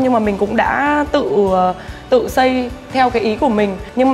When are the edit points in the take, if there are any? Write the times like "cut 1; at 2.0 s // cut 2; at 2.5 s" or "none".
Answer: none

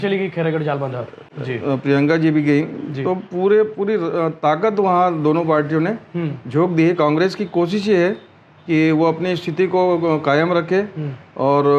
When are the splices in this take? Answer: none

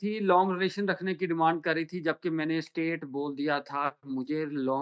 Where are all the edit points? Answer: none

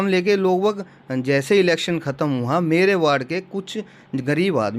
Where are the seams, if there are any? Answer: none

